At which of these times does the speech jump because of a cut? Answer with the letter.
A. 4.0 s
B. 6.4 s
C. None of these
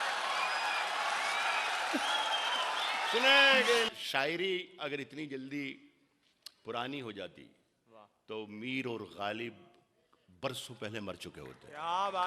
A